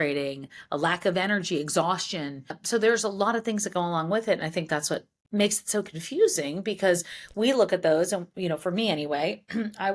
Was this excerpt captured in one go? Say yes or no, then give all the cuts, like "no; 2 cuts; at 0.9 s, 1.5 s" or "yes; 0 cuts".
no; 2 cuts; at 2.6 s, 5.2 s